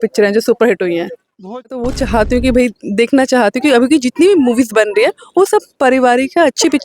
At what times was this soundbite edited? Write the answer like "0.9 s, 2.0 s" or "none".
1.7 s